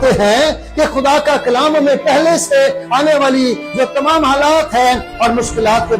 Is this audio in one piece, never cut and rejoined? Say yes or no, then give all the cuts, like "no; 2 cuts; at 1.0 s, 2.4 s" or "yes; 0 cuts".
yes; 0 cuts